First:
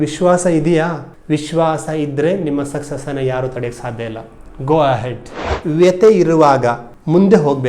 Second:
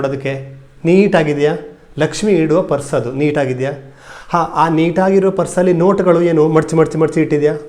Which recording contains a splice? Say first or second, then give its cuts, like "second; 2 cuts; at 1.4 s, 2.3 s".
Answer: first; 1 cut; at 5.5 s